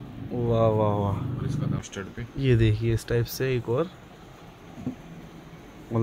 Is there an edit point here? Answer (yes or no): yes